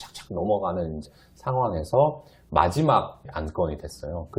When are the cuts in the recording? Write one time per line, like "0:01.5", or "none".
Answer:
0:01.1
0:03.2